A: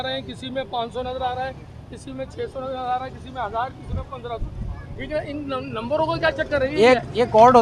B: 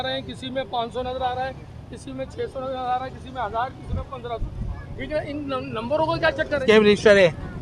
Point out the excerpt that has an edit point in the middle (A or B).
B